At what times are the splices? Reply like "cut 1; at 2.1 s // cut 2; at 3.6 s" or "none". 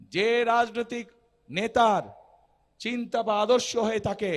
none